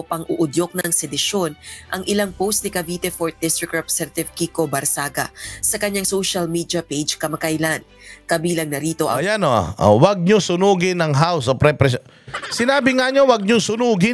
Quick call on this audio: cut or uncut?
uncut